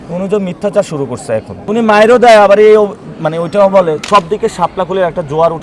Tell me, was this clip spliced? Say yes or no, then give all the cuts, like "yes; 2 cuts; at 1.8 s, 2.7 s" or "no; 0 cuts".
yes; 2 cuts; at 1.5 s, 4.0 s